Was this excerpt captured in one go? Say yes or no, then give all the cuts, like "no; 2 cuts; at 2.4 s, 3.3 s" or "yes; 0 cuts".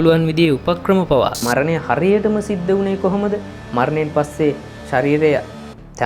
no; 1 cut; at 1.4 s